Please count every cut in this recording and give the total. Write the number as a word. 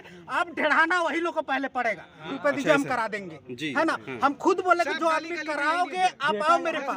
one